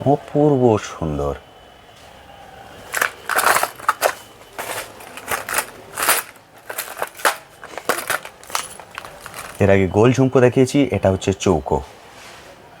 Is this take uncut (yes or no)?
yes